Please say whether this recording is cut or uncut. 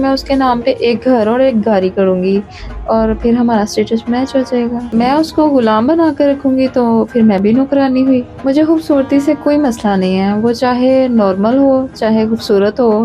cut